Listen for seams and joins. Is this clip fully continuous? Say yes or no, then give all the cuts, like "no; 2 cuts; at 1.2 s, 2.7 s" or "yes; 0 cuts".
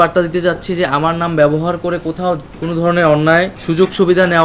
no; 2 cuts; at 2.5 s, 3.6 s